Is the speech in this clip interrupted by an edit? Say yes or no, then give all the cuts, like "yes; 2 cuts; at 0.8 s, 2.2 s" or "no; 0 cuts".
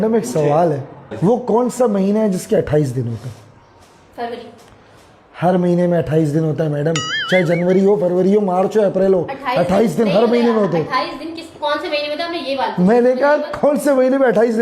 yes; 1 cut; at 1.1 s